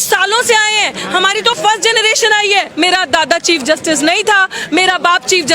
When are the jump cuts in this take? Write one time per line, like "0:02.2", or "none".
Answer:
0:02.7